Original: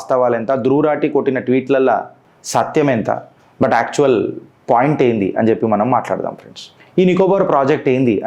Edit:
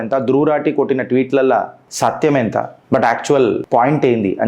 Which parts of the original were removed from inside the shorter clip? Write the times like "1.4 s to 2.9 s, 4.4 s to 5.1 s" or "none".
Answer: 2.2 s to 2.3 s, 3.3 s to 3.4 s, 4.3 s to 4.6 s